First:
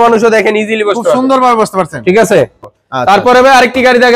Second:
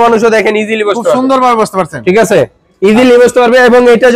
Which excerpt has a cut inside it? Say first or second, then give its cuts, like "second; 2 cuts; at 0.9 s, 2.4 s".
first; 1 cut; at 2.7 s